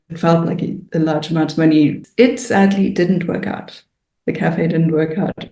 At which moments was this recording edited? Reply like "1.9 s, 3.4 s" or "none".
2.0 s